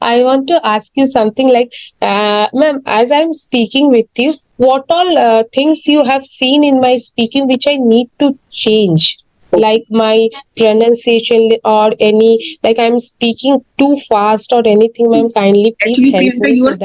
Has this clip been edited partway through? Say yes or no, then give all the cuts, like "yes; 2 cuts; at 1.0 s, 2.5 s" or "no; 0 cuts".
no; 0 cuts